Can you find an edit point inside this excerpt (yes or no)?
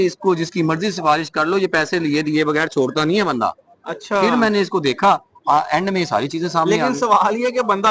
no